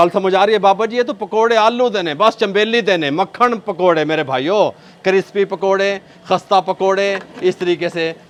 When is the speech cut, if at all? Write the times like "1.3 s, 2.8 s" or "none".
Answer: none